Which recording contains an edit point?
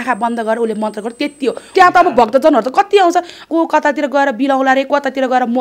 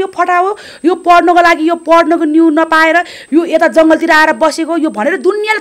first; 2 cuts; at 1.6 s, 3.4 s

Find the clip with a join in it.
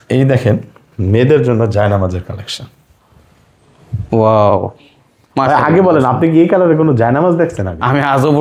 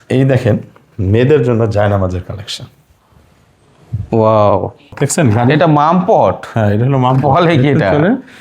second; 1 cut; at 5.0 s

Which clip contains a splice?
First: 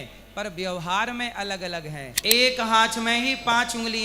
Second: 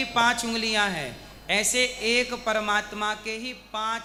first; 1 cut; at 2.1 s

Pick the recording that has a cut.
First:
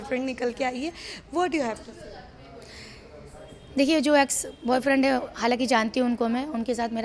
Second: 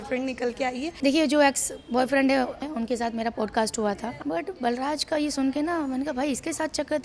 second; 3 cuts; at 0.9 s, 2.6 s, 4.1 s

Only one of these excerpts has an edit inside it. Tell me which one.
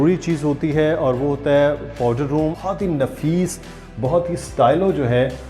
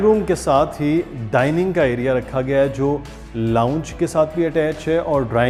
first; 1 cut; at 2.6 s

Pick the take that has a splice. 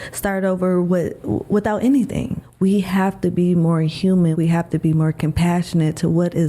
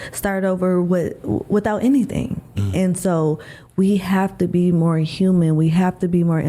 first; 2 cuts; at 2.4 s, 4.3 s

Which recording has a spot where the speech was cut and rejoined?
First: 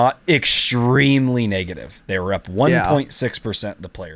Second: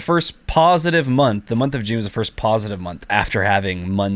second; 1 cut; at 3.1 s

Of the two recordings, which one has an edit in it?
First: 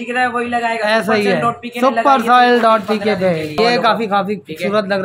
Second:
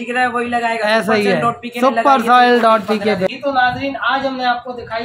first; 1 cut; at 3.6 s

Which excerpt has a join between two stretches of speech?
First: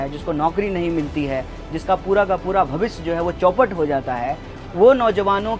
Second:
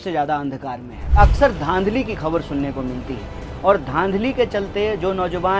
second; 1 cut; at 0.9 s

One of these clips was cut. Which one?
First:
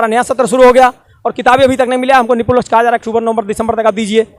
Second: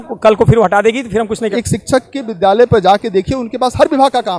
second; 1 cut; at 1.5 s

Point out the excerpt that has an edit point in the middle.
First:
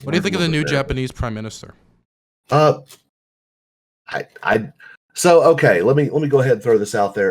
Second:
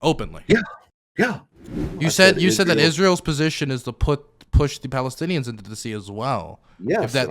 second; 1 cut; at 2.0 s

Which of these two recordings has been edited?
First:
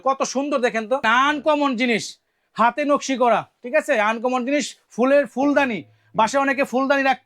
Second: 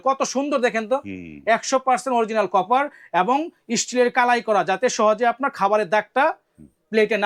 first; 1 cut; at 1.0 s

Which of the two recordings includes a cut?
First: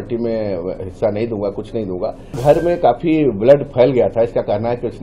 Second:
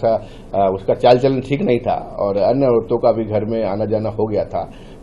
first; 1 cut; at 2.4 s

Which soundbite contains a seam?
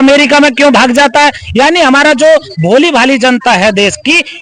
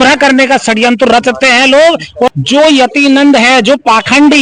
second; 1 cut; at 2.3 s

